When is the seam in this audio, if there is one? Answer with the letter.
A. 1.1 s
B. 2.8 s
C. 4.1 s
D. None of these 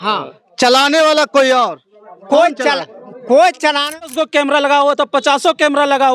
C